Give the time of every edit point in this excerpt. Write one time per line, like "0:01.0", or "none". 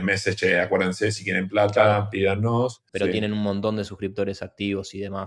0:02.8